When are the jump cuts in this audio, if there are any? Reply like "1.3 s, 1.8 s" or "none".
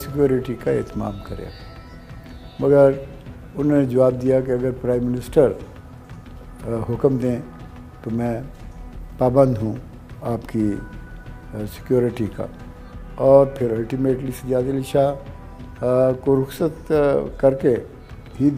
none